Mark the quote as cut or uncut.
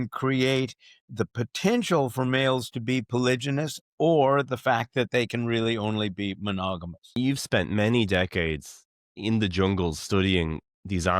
cut